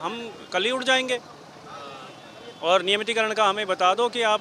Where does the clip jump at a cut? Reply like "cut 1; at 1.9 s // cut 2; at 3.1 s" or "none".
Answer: none

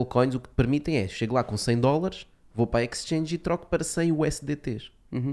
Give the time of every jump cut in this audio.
none

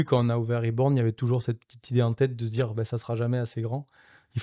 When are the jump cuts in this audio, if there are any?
none

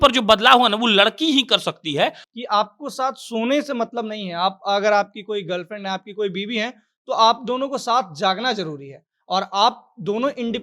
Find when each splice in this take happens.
cut 1; at 2.2 s

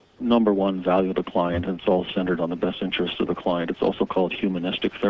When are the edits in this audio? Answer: cut 1; at 3.8 s

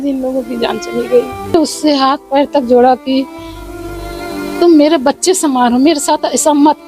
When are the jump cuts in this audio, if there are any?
cut 1; at 1.5 s

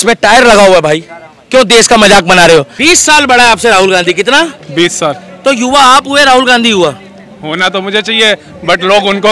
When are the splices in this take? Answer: cut 1; at 2.7 s

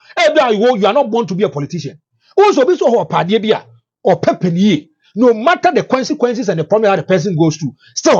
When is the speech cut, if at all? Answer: none

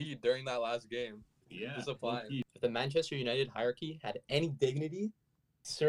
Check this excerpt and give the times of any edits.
cut 1; at 2.5 s

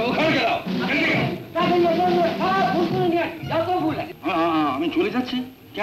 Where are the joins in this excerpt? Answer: cut 1; at 4.1 s

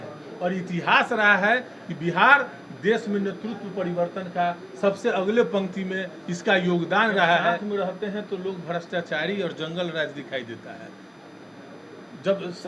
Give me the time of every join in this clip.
cut 1; at 7.6 s

